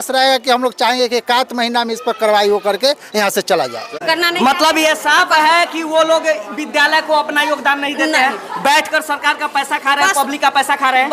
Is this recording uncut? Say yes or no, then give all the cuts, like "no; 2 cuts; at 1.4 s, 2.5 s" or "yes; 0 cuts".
no; 1 cut; at 3.9 s